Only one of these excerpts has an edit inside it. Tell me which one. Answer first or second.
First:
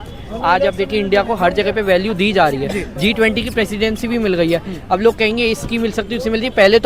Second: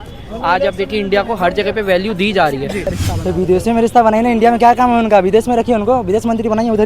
second